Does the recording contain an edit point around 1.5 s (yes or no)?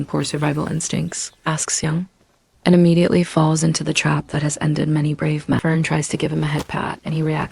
no